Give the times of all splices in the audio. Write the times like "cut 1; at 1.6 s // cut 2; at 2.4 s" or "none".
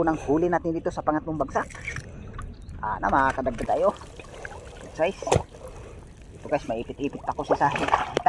cut 1; at 3.6 s